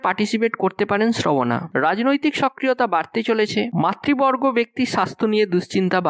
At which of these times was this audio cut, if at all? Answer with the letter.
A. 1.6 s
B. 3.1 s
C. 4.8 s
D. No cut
D